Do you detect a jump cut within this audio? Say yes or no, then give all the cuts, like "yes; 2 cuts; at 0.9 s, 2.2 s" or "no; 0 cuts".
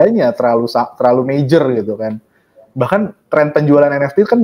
no; 0 cuts